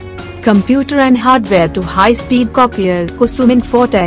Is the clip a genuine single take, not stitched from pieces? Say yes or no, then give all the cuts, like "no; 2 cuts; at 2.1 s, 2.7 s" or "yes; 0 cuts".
no; 1 cut; at 3.1 s